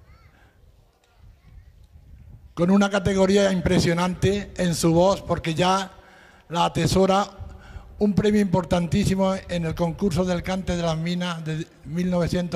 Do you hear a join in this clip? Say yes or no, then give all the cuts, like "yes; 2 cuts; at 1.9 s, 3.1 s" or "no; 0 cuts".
no; 0 cuts